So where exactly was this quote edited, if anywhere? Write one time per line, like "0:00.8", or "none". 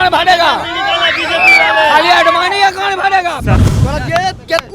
0:03.5